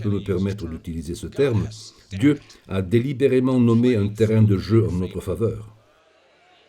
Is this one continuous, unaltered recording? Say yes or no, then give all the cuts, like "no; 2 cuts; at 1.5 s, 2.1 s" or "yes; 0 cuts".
no; 1 cut; at 5.7 s